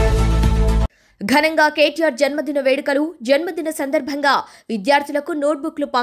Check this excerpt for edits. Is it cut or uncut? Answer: cut